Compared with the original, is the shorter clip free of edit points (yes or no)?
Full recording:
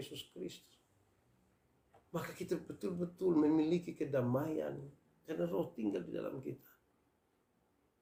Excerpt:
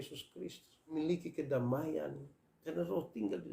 no